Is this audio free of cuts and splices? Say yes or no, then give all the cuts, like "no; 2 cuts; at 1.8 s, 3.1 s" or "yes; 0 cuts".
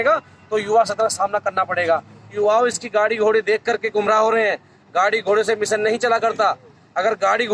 no; 1 cut; at 2.3 s